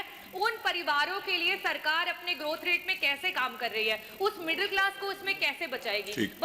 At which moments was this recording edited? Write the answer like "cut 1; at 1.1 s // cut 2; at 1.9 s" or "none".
none